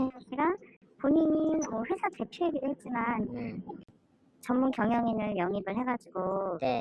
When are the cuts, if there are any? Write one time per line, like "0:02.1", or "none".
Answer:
0:03.8